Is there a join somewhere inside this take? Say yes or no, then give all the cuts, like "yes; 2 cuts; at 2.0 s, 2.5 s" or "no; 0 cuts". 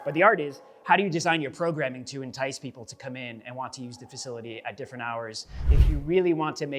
yes; 1 cut; at 5.6 s